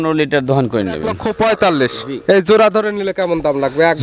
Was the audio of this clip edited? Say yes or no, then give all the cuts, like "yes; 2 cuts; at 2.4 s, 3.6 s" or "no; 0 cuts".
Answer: yes; 1 cut; at 1.2 s